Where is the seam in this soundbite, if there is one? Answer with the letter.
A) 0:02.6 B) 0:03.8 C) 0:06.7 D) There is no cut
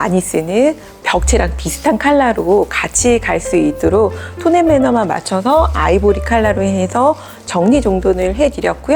D